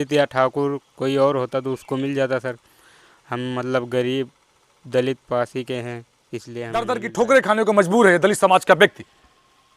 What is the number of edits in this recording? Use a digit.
1